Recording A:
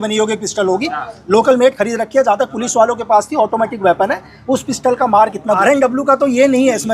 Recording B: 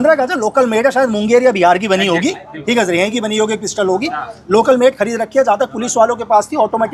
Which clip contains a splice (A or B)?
A